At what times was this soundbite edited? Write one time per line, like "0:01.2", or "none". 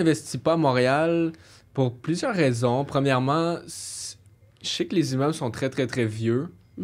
none